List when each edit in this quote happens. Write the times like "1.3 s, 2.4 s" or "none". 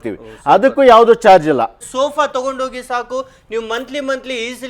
1.8 s